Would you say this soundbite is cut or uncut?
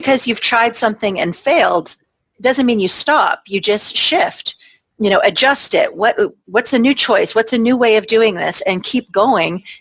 uncut